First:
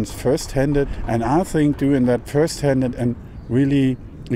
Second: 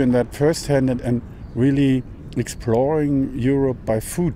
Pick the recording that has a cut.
first; 1 cut; at 1.0 s

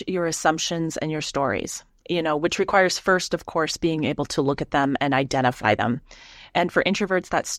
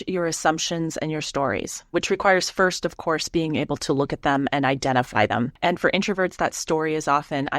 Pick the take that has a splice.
second; 2 cuts; at 1.9 s, 5.5 s

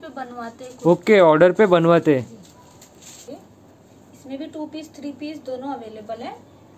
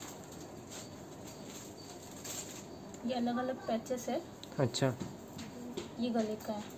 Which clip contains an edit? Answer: first; 1 cut; at 3.3 s

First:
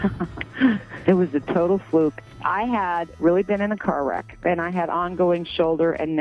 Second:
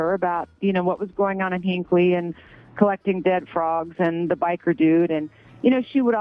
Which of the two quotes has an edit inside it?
first; 1 cut; at 2.3 s

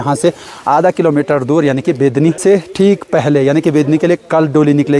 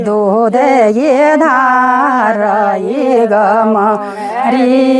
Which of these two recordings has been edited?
first; 1 cut; at 2.4 s

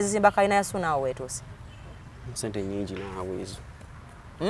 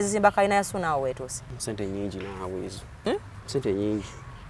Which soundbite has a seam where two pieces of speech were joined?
second; 2 cuts; at 1.5 s, 3.1 s

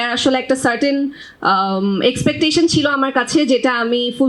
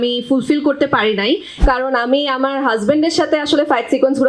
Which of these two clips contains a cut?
second; 1 cut; at 1.6 s

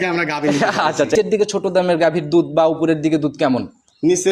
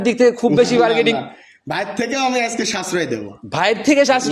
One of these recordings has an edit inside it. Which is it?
first; 1 cut; at 1.1 s

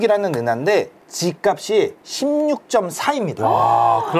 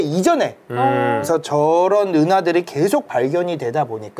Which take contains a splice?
second; 1 cut; at 1.2 s

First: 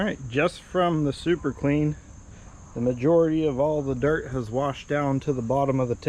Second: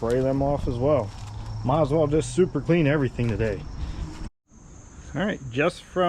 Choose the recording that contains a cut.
second; 1 cut; at 4.2 s

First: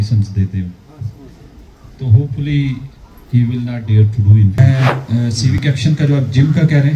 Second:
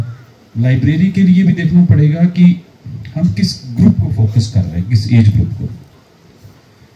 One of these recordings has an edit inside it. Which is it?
first; 1 cut; at 4.6 s

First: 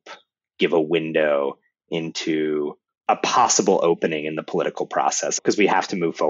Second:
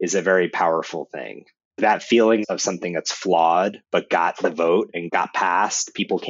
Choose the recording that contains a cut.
second; 3 cuts; at 1.7 s, 2.5 s, 5.0 s

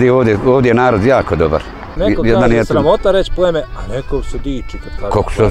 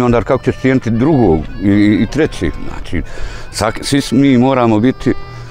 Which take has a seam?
first; 1 cut; at 1.9 s

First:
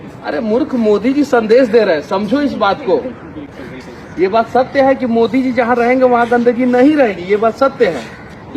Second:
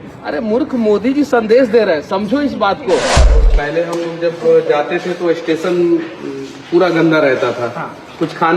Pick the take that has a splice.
second; 1 cut; at 3.5 s

